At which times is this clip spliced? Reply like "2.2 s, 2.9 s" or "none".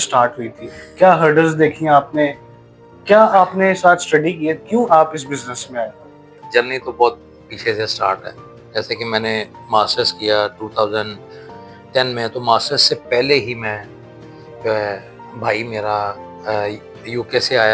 6.4 s